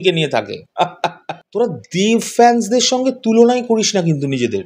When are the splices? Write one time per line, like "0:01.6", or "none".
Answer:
0:01.4